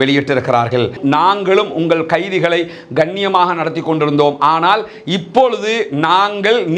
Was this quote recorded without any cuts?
no; 1 cut; at 1.0 s

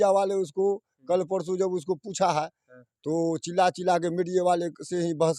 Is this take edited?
no; 0 cuts

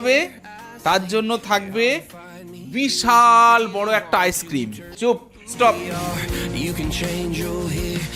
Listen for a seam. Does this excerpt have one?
yes; 1 cut; at 4.8 s

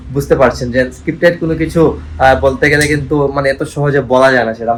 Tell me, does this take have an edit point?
no; 0 cuts

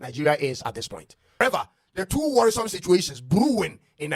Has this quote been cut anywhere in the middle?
yes; 1 cut; at 1.4 s

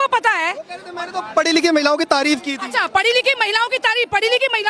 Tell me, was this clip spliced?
no; 0 cuts

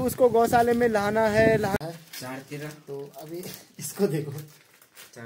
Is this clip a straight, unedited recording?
no; 1 cut; at 1.8 s

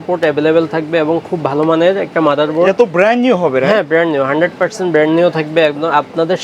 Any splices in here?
no; 0 cuts

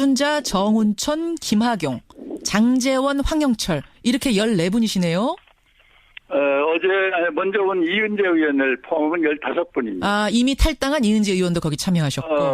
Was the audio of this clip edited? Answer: yes; 1 cut; at 10.5 s

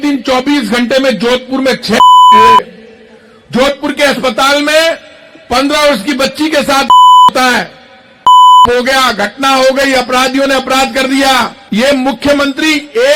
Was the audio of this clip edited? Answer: no; 0 cuts

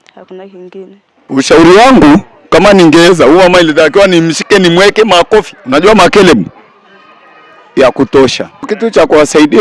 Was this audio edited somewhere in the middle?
yes; 1 cut; at 1.2 s

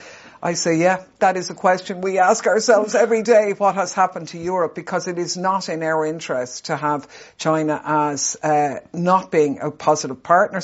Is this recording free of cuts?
yes; 0 cuts

